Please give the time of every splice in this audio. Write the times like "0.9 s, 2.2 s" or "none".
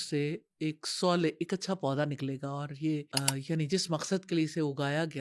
3.1 s